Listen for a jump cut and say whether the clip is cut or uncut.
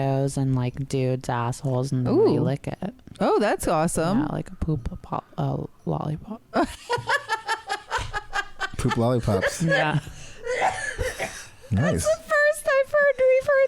cut